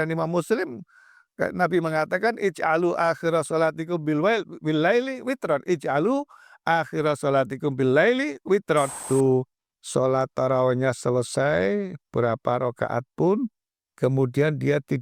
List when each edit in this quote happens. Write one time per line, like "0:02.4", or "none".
0:09.0